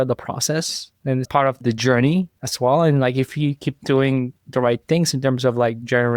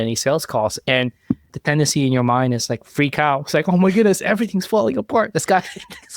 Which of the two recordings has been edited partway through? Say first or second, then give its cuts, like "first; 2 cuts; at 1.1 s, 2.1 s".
first; 1 cut; at 1.3 s